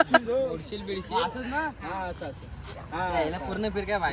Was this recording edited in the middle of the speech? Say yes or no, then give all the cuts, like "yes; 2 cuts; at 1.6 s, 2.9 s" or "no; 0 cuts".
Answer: no; 0 cuts